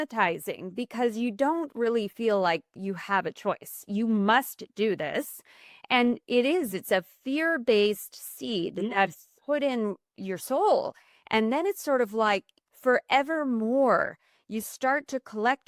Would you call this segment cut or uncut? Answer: uncut